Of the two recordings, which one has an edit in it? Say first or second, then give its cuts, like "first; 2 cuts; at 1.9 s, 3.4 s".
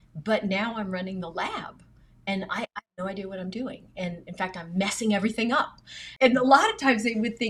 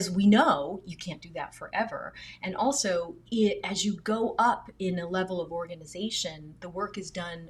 first; 1 cut; at 6.0 s